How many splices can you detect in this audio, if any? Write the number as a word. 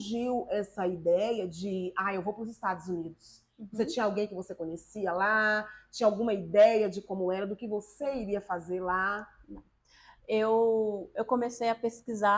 zero